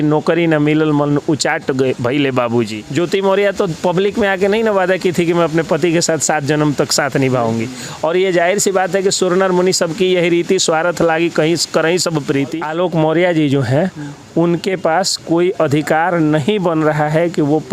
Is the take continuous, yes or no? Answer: no